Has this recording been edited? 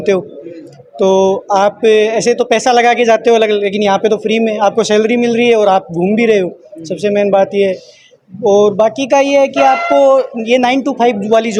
no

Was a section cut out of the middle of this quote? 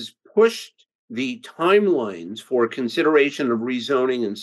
no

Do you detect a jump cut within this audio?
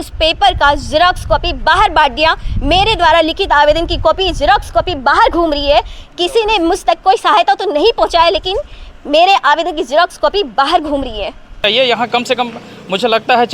yes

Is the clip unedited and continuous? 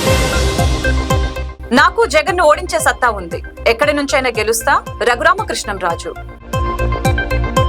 no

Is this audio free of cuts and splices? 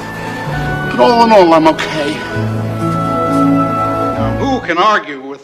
no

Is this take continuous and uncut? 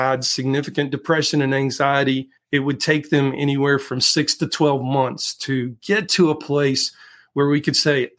no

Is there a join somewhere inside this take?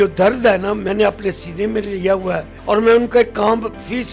yes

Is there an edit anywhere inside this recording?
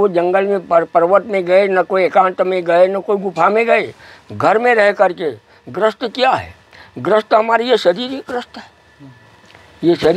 no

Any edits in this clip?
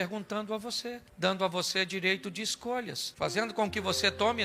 no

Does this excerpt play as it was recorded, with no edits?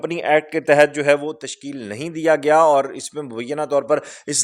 yes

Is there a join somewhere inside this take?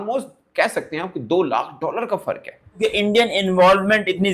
yes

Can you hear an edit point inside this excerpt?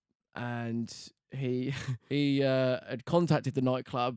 yes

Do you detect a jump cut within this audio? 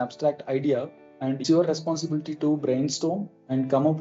yes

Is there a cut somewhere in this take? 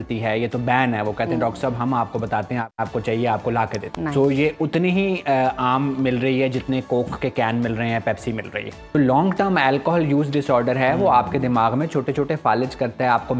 yes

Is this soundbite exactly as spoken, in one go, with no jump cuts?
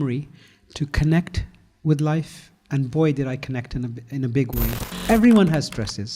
no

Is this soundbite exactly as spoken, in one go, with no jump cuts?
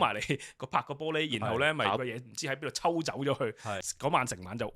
no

